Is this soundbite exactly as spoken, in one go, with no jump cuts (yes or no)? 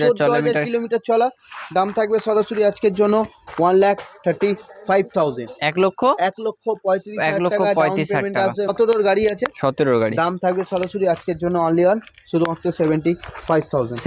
no